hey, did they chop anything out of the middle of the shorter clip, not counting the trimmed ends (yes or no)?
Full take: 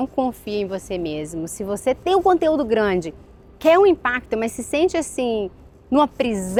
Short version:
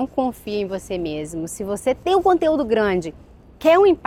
no